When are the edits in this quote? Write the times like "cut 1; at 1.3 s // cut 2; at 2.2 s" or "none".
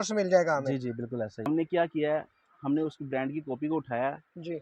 cut 1; at 1.4 s

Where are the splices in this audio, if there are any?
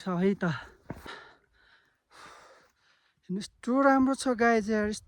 cut 1; at 1.2 s

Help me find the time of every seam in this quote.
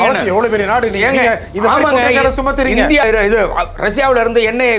cut 1; at 3.0 s

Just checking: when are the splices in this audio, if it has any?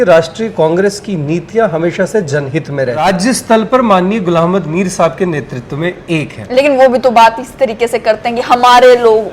cut 1; at 3.0 s

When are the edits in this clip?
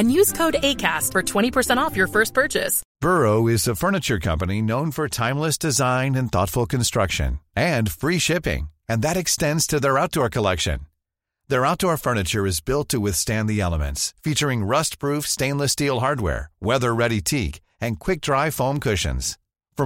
cut 1; at 2.8 s

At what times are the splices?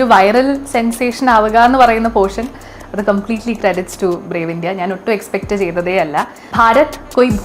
cut 1; at 6.4 s

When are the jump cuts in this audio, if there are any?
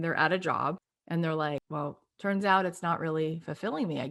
cut 1; at 0.9 s // cut 2; at 1.7 s

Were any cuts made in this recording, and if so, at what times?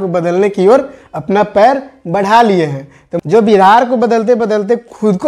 cut 1; at 3.1 s

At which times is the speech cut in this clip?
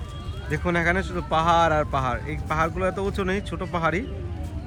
none

